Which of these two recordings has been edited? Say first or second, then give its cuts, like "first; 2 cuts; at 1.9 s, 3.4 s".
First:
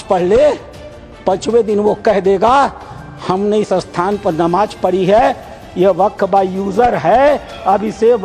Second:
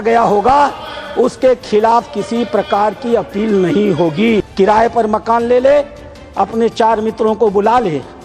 second; 1 cut; at 4.5 s